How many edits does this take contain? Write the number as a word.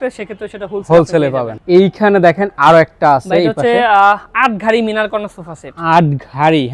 zero